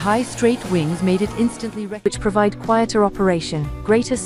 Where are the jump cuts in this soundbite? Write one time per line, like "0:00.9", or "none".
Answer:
0:01.9